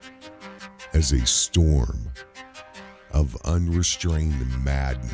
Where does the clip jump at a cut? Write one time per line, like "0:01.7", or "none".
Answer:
0:00.9